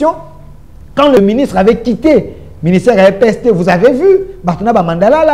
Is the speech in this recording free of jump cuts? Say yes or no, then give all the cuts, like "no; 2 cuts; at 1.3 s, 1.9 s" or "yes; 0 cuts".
no; 1 cut; at 1.2 s